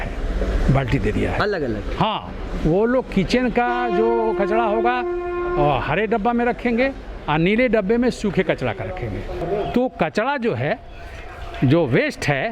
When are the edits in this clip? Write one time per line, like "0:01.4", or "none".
0:09.4